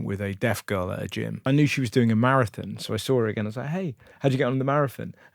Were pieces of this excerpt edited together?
yes; 1 cut; at 1.4 s

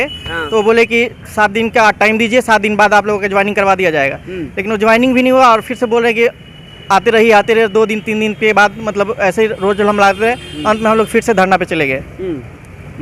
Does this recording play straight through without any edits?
yes; 0 cuts

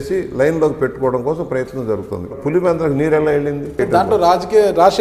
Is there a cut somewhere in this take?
yes; 2 cuts; at 2.4 s, 3.8 s

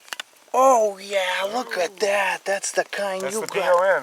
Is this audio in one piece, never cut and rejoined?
yes; 0 cuts

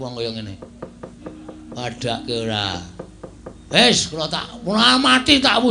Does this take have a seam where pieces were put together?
no; 0 cuts

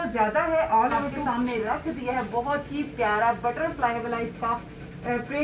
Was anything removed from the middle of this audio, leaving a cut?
yes; 1 cut; at 1.1 s

